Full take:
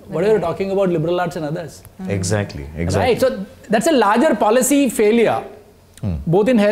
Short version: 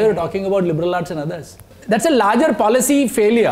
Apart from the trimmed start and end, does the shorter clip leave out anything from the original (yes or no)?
yes